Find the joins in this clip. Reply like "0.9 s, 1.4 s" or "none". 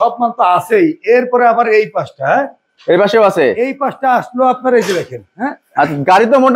none